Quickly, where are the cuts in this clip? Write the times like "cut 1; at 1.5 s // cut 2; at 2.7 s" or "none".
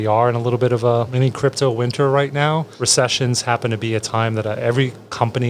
cut 1; at 1.1 s // cut 2; at 2.7 s